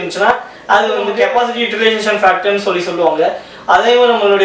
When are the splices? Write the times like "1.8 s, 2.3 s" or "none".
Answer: 1.1 s